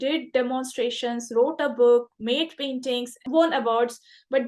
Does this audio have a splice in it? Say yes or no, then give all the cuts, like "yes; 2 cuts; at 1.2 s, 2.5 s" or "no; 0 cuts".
yes; 1 cut; at 3.2 s